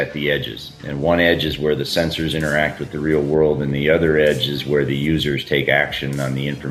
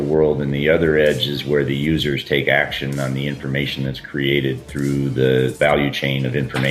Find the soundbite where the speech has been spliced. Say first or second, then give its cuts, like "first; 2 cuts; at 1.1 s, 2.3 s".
second; 1 cut; at 5.5 s